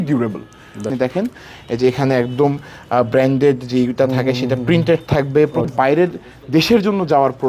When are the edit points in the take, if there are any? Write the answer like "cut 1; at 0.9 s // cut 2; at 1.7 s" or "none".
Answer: cut 1; at 0.9 s // cut 2; at 5.7 s